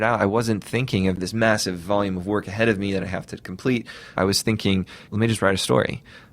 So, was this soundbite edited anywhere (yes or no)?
yes